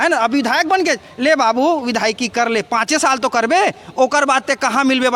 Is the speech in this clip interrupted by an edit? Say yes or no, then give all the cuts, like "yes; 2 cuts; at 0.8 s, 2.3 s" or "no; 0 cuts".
no; 0 cuts